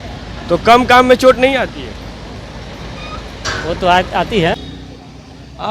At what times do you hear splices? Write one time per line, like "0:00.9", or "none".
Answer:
0:04.6